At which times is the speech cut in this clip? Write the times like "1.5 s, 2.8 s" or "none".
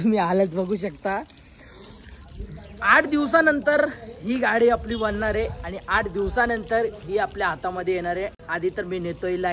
none